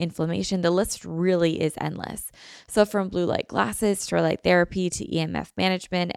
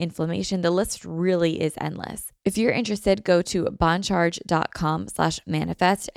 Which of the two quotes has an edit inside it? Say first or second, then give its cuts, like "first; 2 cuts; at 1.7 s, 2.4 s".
second; 1 cut; at 2.2 s